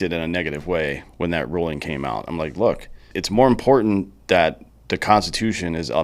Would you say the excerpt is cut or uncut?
cut